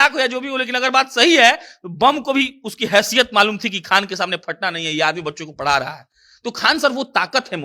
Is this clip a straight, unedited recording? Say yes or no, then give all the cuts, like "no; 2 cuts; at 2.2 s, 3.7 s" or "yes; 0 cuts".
yes; 0 cuts